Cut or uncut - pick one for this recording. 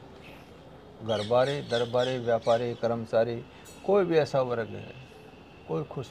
uncut